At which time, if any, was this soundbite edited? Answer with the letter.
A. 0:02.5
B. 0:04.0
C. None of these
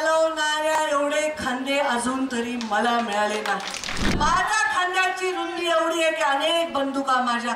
B